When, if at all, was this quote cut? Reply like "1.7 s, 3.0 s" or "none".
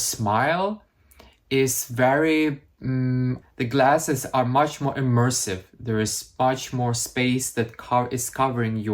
3.4 s